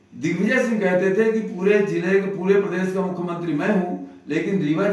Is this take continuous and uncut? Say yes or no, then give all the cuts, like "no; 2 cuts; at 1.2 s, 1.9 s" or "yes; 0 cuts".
yes; 0 cuts